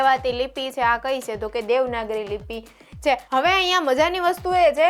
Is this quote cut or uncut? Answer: cut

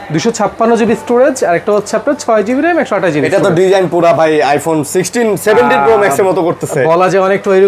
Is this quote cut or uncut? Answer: uncut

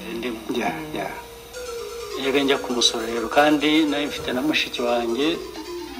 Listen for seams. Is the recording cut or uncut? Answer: uncut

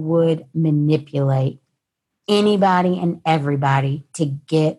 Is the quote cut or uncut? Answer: uncut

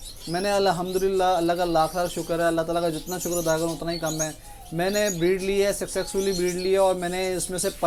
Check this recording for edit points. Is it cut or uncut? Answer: uncut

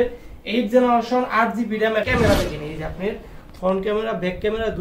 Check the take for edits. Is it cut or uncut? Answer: cut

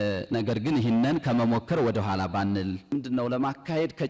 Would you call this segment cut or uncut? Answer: cut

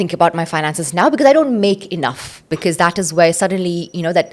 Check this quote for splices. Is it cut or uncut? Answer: cut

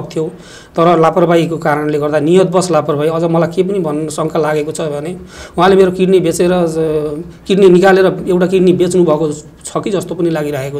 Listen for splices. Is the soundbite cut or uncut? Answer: uncut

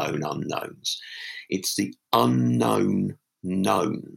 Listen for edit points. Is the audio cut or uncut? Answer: uncut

